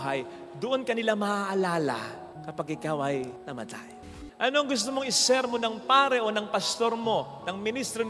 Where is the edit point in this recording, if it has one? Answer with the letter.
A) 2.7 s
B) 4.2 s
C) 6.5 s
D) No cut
B